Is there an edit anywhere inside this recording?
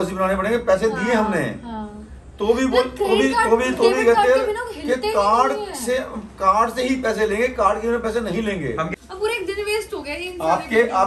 yes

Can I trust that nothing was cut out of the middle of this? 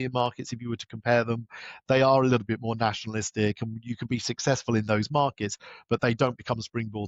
yes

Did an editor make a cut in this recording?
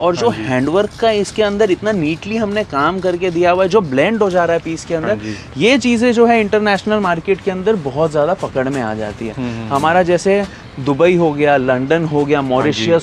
no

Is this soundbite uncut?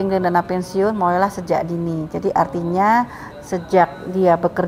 yes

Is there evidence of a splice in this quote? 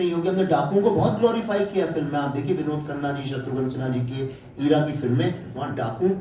no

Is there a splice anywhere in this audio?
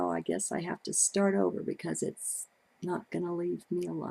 yes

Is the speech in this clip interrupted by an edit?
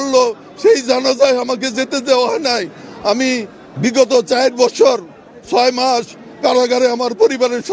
yes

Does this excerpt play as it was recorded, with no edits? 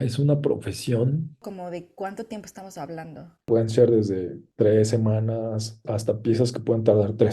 no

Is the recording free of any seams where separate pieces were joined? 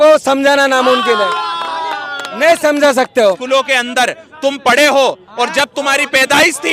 no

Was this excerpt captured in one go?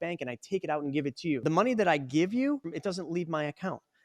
no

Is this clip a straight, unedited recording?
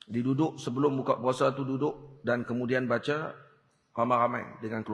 yes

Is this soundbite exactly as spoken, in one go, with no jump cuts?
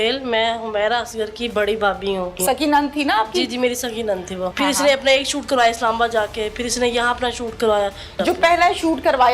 no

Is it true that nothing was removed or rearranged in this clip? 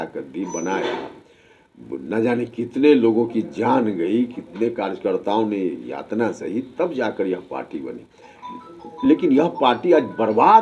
yes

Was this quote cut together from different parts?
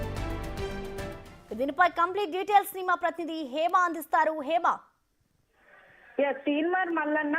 yes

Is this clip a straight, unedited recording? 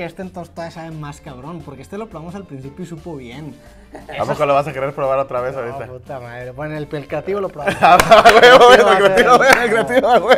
yes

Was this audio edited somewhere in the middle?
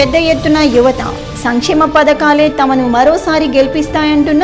no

